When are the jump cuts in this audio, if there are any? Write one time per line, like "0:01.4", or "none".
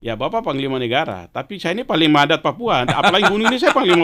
none